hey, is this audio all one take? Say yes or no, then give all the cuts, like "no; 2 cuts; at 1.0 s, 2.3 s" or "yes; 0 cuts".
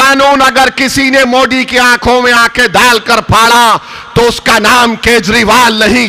yes; 0 cuts